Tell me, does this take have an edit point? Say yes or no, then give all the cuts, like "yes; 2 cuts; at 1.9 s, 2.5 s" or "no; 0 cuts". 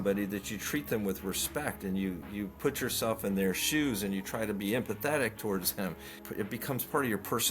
yes; 1 cut; at 6.2 s